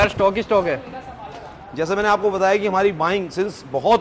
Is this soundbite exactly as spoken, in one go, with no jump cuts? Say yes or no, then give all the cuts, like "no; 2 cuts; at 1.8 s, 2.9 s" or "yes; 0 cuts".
yes; 0 cuts